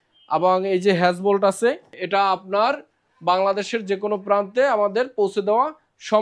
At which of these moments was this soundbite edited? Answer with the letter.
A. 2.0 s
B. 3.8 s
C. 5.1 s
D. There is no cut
A